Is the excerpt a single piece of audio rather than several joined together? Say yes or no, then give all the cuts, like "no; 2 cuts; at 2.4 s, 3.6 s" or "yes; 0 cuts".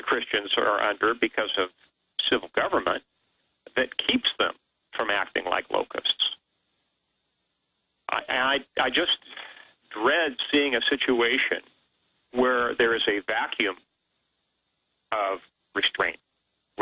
yes; 0 cuts